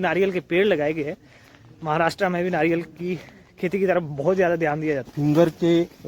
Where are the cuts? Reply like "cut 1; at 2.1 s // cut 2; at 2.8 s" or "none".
cut 1; at 5.1 s